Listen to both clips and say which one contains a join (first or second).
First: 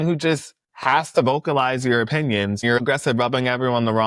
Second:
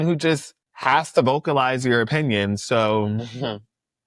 first